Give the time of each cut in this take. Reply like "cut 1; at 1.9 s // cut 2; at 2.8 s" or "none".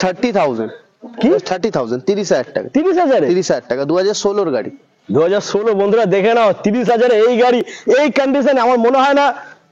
none